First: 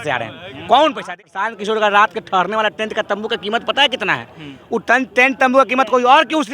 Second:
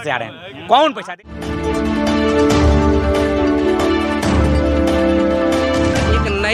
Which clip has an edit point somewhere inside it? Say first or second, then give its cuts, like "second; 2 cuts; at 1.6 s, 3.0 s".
first; 1 cut; at 1.5 s